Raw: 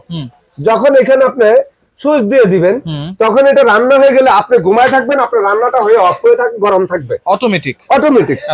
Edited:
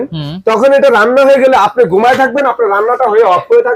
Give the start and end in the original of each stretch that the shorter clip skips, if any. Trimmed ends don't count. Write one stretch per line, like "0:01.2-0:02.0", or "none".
none